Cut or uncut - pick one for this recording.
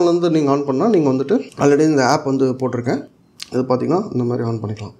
cut